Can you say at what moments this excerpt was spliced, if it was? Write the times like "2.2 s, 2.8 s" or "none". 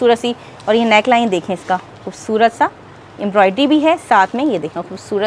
none